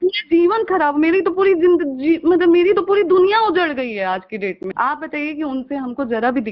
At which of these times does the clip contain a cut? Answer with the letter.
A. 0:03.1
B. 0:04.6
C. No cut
B